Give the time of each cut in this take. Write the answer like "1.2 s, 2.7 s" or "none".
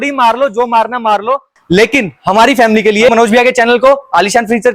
1.5 s, 3.1 s

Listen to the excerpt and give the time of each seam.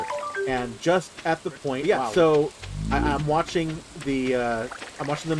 1.8 s

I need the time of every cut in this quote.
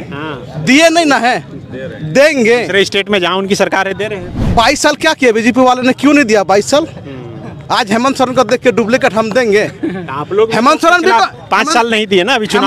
4.4 s

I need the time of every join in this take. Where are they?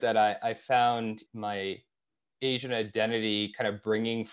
1.3 s

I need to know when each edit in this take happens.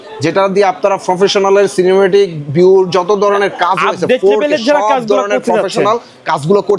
none

